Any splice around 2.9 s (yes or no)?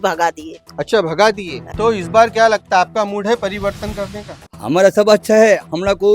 no